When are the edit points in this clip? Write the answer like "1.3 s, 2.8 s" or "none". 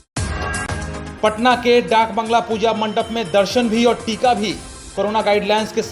none